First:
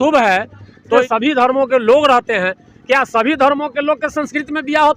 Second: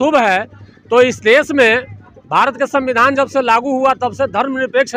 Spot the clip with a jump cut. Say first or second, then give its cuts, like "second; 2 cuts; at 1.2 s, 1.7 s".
first; 1 cut; at 1.0 s